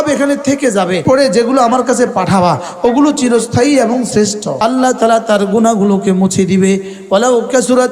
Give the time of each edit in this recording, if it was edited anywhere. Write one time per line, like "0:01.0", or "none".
0:01.0
0:04.5